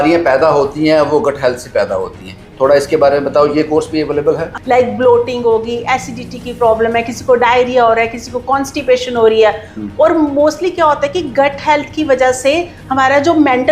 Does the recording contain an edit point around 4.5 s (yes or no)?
yes